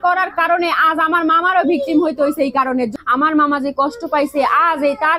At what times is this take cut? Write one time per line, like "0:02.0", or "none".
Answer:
0:02.9